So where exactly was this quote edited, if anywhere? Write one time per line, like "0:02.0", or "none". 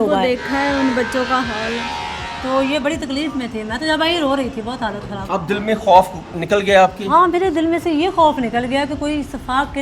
0:05.1